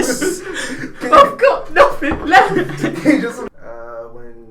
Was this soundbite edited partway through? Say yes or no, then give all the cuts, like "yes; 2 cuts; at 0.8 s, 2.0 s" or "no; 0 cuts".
yes; 1 cut; at 3.5 s